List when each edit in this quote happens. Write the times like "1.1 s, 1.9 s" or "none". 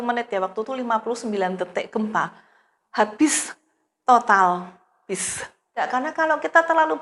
5.8 s